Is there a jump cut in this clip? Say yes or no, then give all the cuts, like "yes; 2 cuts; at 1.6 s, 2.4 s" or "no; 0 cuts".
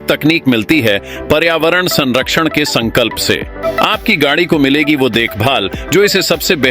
yes; 1 cut; at 3.6 s